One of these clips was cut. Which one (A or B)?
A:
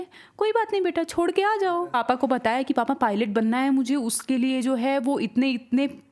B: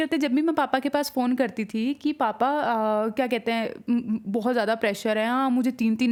A